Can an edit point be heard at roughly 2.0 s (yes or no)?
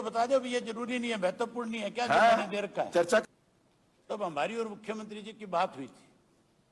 no